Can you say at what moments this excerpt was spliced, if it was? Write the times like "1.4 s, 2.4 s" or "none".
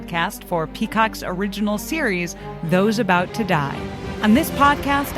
4.1 s